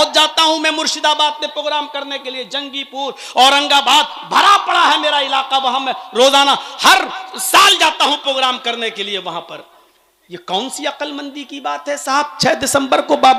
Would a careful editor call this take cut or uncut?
uncut